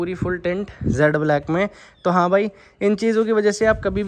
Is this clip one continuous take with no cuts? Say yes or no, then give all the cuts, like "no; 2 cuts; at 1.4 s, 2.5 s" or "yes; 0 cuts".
yes; 0 cuts